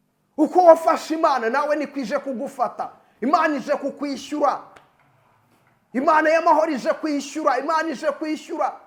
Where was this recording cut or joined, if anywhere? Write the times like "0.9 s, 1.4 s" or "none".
none